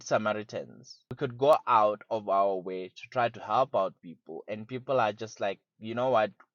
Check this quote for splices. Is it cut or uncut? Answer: uncut